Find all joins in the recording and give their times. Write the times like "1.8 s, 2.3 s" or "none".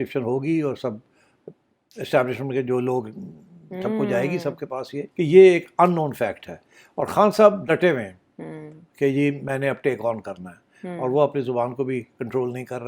5.0 s